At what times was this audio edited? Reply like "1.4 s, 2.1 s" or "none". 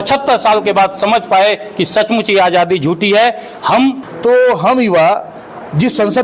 4.1 s